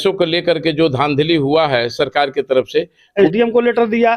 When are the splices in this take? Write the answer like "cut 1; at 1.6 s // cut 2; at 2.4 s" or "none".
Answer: cut 1; at 3.1 s